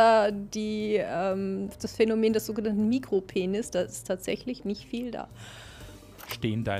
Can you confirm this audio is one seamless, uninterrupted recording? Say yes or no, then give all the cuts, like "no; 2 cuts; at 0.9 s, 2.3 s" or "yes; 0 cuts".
yes; 0 cuts